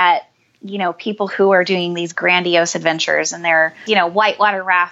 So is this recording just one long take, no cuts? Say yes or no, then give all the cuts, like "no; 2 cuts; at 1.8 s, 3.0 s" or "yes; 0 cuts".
no; 1 cut; at 3.8 s